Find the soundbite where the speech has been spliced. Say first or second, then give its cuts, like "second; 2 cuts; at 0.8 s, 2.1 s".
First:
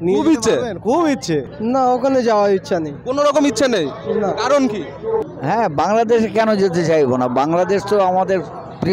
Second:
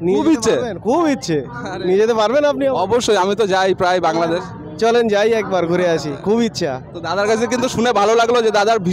first; 2 cuts; at 1.5 s, 5.3 s